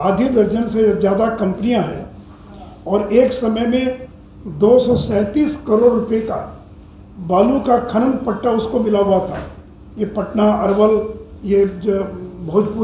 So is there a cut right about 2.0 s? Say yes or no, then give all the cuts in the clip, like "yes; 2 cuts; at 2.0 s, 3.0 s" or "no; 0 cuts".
no; 0 cuts